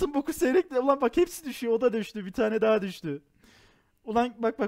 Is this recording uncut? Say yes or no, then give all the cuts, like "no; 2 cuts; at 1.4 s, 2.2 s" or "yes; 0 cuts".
yes; 0 cuts